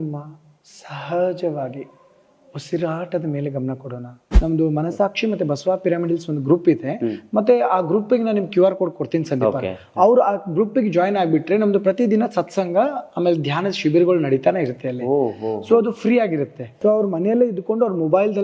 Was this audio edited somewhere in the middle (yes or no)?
yes